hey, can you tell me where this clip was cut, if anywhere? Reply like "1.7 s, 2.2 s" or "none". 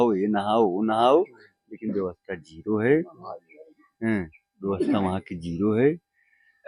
none